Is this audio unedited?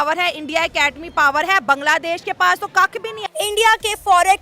no; 1 cut; at 3.2 s

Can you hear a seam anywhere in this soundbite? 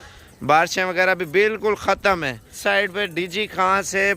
yes; 1 cut; at 2.5 s

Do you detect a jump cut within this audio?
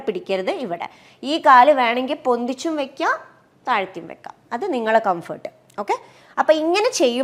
no; 0 cuts

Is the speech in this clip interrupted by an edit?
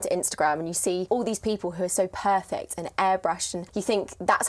yes; 2 cuts; at 1.0 s, 3.6 s

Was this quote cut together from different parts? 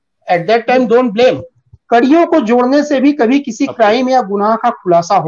yes; 1 cut; at 1.7 s

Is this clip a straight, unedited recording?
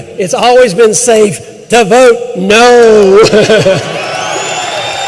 yes; 0 cuts

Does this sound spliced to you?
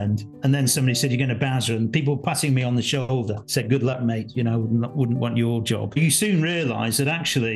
yes; 1 cut; at 6.0 s

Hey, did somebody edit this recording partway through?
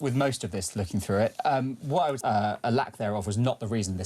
yes; 1 cut; at 2.2 s

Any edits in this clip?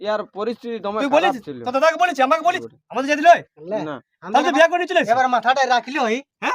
yes; 1 cut; at 2.7 s

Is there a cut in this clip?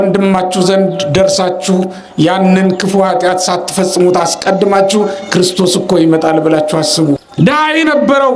yes; 1 cut; at 7.3 s

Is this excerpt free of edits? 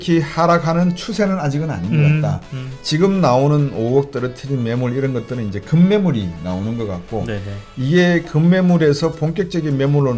yes; 0 cuts

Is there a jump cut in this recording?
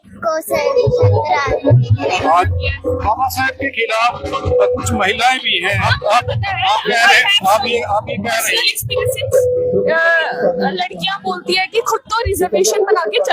yes; 2 cuts; at 2.5 s, 5.9 s

